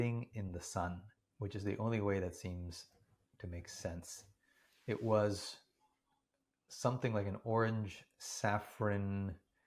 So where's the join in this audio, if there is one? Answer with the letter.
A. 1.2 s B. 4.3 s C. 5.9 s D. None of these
A